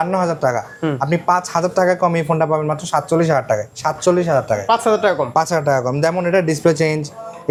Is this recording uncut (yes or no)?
yes